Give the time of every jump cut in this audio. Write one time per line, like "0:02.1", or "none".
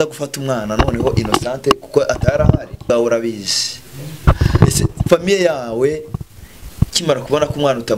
0:02.8